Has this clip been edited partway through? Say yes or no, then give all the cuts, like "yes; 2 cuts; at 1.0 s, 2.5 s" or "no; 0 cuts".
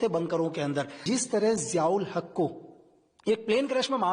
yes; 1 cut; at 1.0 s